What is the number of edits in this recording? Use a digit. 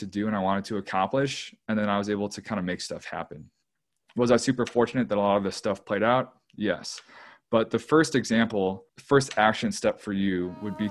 1